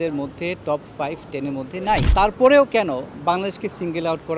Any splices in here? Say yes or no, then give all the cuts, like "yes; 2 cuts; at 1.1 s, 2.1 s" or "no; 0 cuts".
yes; 1 cut; at 2.1 s